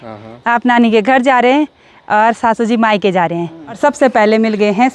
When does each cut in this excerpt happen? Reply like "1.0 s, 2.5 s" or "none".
3.6 s

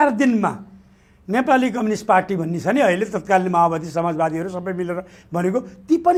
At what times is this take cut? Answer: none

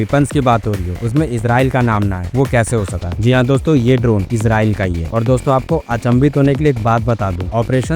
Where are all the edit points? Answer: none

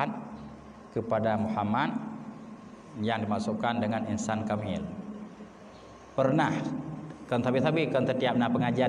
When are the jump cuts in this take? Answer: none

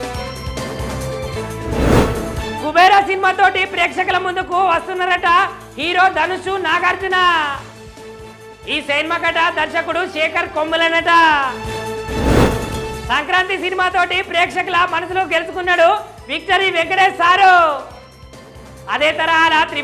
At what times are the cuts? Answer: 1.4 s

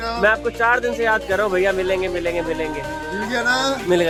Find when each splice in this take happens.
none

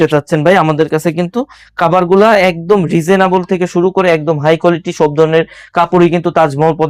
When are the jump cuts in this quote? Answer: none

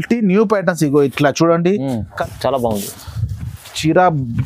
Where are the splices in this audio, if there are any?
2.2 s

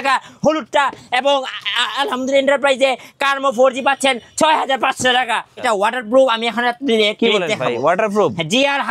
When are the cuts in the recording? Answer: 5.6 s

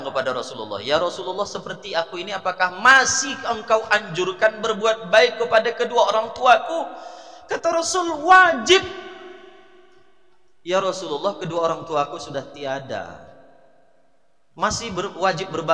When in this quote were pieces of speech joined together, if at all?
none

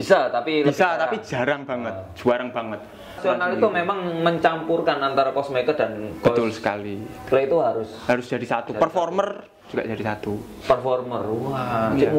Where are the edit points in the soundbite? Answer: 3.2 s

